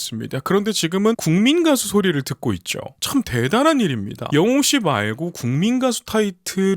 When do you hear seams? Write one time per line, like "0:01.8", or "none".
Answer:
0:01.2
0:04.1